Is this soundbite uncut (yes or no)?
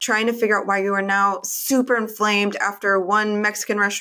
yes